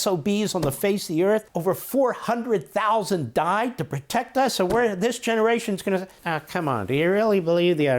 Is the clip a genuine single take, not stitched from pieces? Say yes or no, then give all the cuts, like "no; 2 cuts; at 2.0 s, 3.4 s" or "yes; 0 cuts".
no; 2 cuts; at 1.5 s, 6.2 s